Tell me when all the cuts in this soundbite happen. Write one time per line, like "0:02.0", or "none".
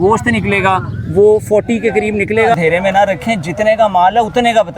0:02.5